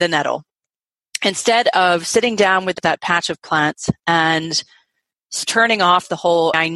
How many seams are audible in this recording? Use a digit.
1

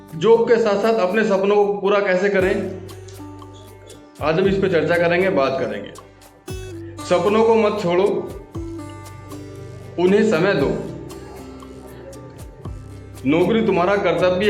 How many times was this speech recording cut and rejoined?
2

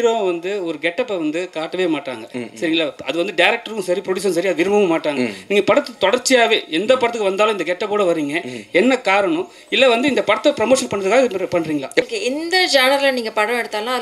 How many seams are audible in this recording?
1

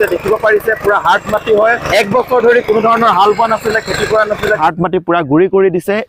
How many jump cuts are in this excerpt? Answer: 2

